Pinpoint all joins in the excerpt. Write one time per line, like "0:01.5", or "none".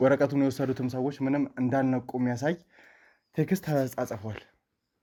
none